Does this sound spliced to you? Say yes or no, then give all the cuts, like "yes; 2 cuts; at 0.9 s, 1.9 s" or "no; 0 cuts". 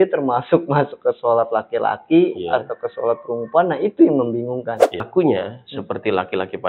yes; 1 cut; at 5.1 s